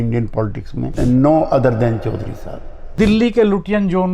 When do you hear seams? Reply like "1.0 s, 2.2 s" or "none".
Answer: 0.9 s, 2.9 s